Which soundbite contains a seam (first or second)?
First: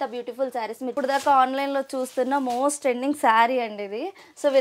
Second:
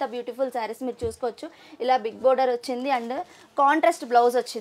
first